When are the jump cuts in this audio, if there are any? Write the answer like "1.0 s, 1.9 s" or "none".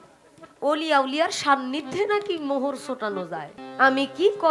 3.6 s